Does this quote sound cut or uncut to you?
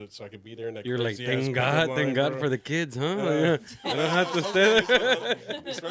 uncut